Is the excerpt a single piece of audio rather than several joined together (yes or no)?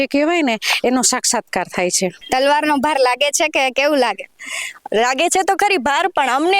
no